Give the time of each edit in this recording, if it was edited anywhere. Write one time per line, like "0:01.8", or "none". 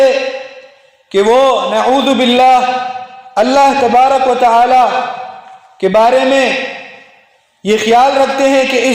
none